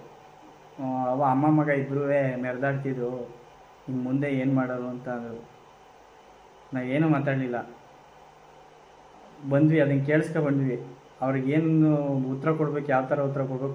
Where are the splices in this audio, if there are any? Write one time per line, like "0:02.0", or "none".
none